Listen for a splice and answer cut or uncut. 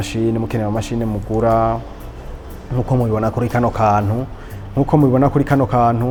uncut